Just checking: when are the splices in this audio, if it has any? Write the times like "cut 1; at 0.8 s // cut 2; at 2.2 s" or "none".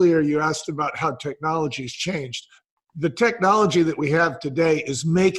cut 1; at 2.6 s